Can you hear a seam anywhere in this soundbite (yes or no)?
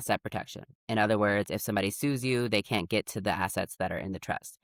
no